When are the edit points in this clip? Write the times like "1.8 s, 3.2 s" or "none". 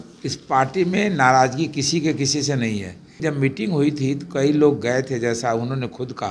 3.2 s